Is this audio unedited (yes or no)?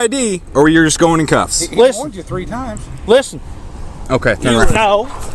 yes